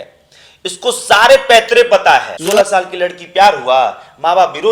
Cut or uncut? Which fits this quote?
cut